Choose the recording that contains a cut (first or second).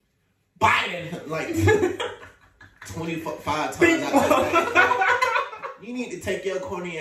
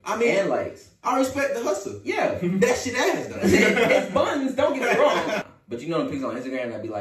second